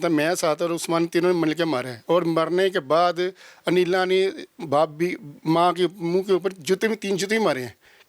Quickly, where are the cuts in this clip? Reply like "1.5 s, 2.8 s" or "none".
none